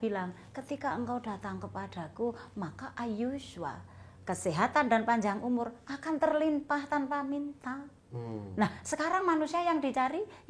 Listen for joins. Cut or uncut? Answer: uncut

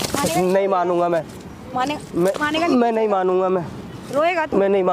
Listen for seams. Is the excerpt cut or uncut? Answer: uncut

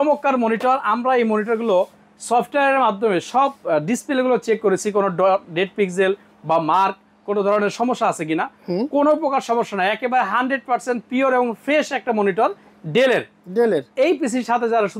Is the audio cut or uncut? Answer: uncut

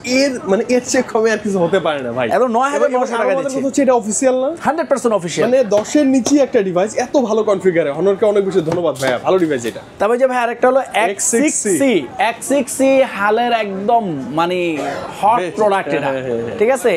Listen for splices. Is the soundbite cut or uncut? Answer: uncut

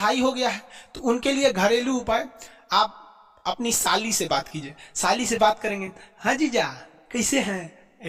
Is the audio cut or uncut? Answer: uncut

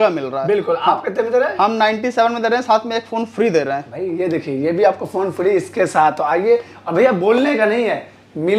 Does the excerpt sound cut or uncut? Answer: uncut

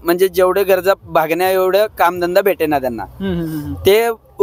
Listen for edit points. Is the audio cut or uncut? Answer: uncut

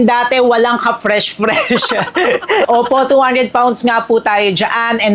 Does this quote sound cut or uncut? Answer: uncut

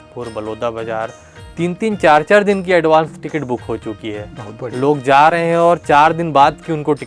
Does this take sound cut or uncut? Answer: uncut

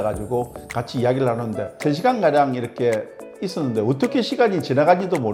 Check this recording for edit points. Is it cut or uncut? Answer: uncut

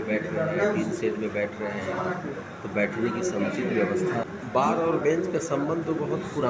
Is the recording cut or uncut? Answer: cut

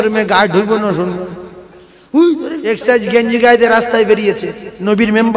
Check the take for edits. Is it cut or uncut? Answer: cut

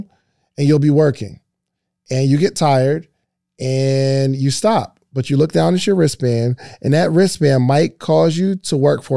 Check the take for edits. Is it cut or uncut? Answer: uncut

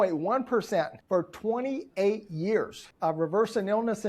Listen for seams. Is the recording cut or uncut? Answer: cut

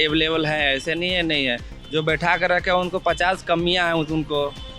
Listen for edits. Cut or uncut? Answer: uncut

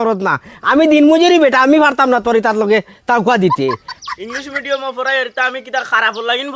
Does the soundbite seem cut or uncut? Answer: cut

